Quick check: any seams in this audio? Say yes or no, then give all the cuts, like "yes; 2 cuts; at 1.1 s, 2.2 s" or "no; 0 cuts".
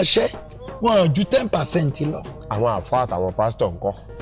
no; 0 cuts